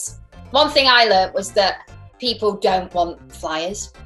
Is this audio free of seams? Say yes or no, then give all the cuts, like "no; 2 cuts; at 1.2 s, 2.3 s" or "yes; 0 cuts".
yes; 0 cuts